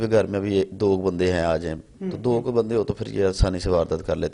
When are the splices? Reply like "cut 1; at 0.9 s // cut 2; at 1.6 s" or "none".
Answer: none